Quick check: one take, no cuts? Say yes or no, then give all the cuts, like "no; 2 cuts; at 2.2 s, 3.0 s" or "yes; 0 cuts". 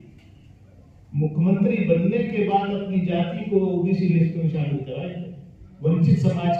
no; 1 cut; at 5.7 s